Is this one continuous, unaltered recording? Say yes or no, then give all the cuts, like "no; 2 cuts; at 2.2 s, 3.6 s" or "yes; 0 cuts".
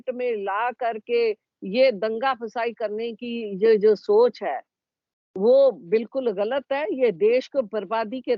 yes; 0 cuts